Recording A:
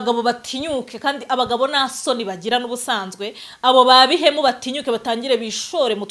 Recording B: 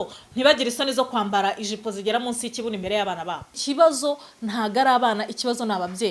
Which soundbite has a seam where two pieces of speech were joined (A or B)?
B